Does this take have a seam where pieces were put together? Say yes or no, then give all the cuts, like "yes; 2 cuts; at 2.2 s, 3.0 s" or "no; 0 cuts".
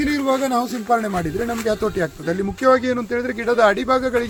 no; 0 cuts